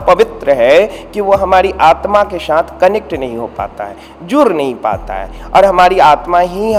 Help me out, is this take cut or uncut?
uncut